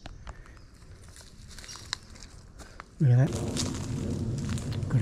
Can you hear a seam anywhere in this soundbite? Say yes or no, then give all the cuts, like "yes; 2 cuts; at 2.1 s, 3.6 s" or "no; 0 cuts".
yes; 1 cut; at 3.3 s